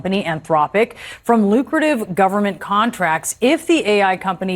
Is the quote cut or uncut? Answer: uncut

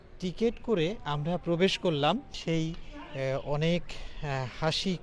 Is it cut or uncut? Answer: cut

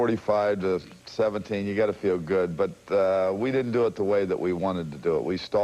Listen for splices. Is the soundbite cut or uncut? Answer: cut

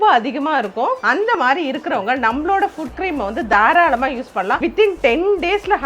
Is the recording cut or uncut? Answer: cut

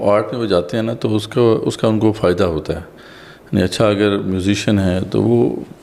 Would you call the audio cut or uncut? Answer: uncut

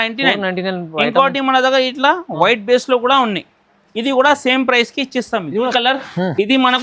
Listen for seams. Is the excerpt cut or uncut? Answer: cut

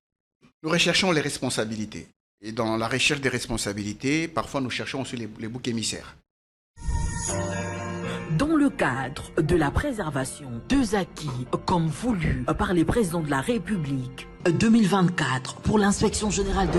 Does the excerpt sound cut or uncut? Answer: uncut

